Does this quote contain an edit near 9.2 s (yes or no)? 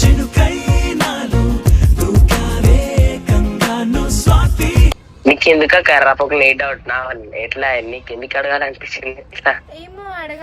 no